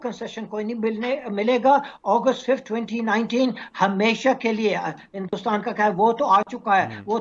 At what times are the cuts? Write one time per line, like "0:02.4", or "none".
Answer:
none